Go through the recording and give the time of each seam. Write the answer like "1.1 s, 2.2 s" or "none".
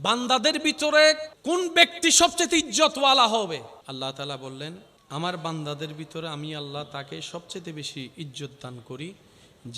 1.3 s, 3.8 s, 4.9 s